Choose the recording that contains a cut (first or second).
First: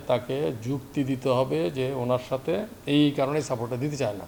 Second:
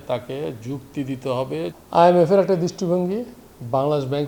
second